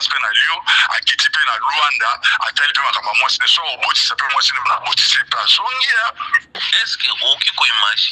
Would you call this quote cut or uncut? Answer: cut